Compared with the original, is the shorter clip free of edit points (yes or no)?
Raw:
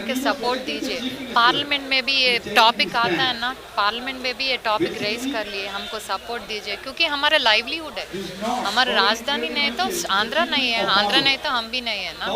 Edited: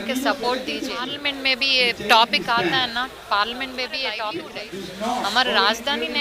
no